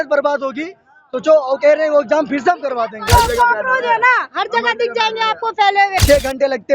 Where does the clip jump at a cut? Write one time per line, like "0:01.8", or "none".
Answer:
0:03.0
0:06.0